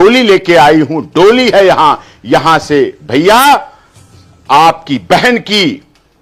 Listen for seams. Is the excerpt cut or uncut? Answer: uncut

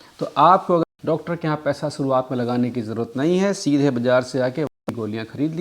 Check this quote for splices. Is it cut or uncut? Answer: cut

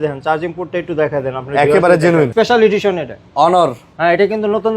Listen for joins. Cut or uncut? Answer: cut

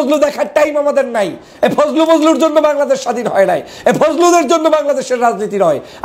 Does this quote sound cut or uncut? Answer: uncut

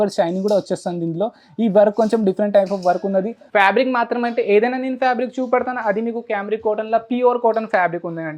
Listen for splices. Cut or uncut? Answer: cut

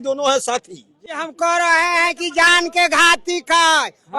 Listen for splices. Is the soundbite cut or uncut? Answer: uncut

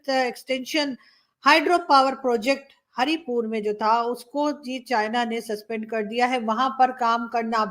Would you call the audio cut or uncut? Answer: uncut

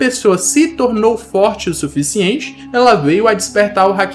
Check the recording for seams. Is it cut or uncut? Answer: uncut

